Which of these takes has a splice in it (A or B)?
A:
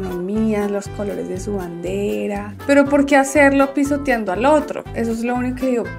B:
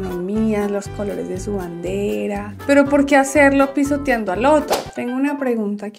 B